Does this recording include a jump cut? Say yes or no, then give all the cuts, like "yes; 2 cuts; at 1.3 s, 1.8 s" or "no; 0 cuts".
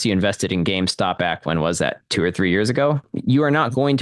yes; 2 cuts; at 1.2 s, 3.1 s